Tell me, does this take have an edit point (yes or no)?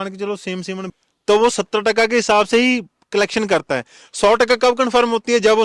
yes